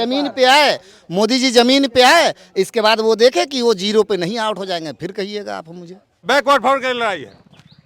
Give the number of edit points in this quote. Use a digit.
1